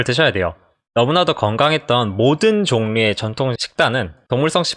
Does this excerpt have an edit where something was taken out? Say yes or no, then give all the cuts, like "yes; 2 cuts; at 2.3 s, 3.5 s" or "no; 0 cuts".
no; 0 cuts